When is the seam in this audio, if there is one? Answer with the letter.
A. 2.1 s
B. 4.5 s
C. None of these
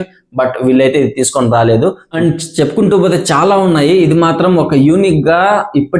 A